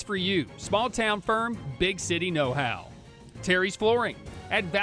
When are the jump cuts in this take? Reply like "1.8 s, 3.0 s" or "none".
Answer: none

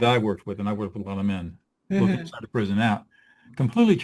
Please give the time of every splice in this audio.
none

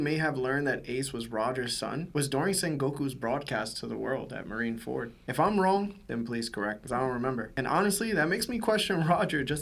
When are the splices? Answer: none

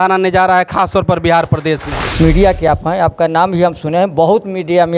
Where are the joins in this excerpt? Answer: 2.0 s

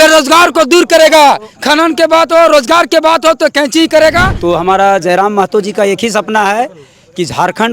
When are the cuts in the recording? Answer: 4.3 s

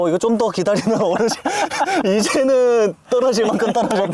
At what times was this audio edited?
none

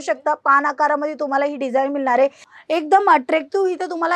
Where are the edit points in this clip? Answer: 2.5 s

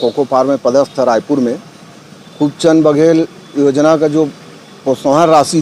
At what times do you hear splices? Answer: none

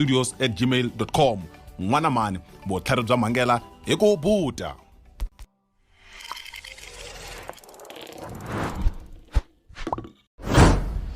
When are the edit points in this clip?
10.2 s

